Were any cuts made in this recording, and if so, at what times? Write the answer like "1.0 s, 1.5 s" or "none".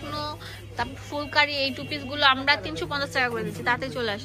none